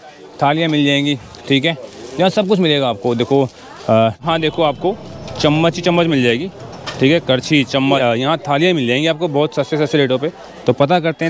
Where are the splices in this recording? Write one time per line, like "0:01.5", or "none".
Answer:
0:04.2
0:08.0